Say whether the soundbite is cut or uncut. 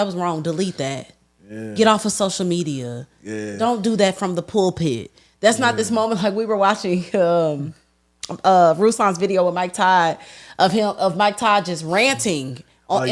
uncut